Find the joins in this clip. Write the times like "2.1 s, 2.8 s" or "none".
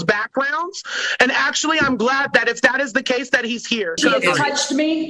4.0 s